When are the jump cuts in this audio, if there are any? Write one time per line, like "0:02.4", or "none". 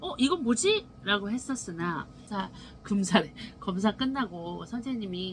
0:02.2